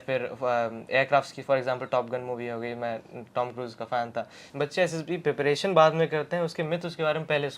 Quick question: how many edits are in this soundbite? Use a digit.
1